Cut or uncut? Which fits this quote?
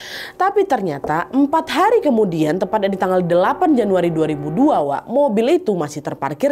uncut